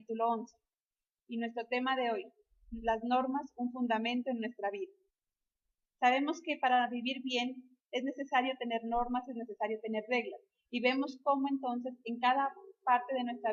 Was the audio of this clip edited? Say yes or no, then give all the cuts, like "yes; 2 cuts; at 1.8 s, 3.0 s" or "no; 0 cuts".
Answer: no; 0 cuts